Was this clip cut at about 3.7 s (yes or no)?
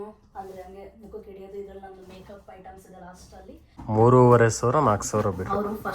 yes